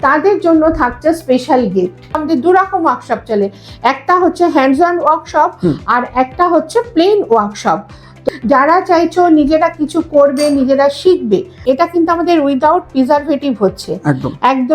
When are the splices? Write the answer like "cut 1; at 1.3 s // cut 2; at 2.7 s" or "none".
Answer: cut 1; at 2.1 s // cut 2; at 8.2 s // cut 3; at 11.6 s

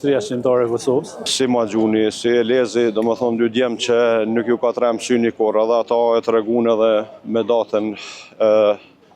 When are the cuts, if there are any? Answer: cut 1; at 1.3 s

